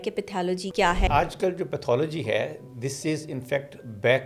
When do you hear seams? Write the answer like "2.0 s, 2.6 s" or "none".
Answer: 1.0 s

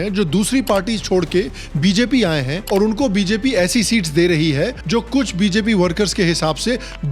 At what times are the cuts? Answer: none

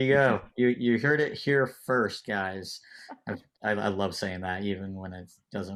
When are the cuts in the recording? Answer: none

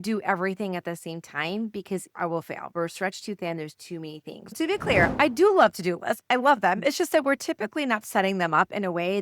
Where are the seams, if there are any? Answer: 4.6 s

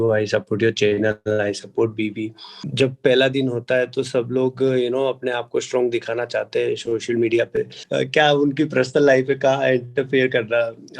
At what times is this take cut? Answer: 2.7 s, 7.8 s

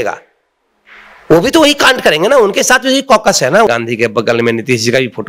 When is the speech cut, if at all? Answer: 3.7 s

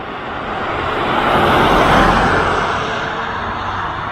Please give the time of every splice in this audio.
none

